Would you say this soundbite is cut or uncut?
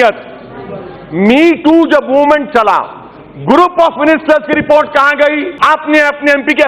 cut